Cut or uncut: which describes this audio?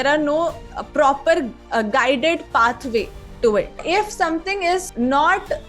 cut